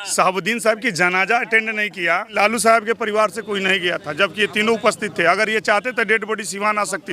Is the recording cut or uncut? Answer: cut